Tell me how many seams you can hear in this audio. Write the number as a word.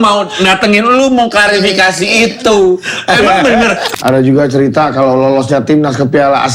one